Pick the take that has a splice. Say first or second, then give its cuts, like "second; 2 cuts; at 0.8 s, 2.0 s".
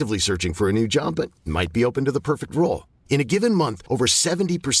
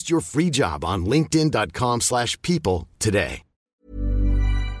second; 1 cut; at 3.6 s